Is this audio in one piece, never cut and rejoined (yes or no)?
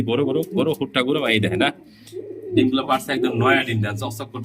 yes